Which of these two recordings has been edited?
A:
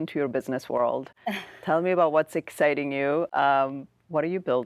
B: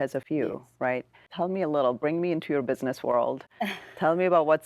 B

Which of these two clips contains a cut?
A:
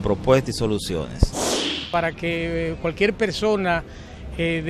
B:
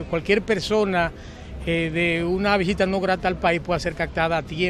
A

